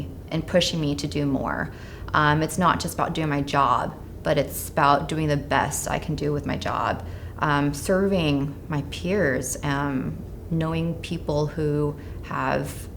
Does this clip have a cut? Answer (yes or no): no